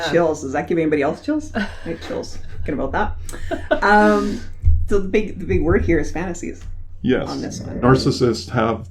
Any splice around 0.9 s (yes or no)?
no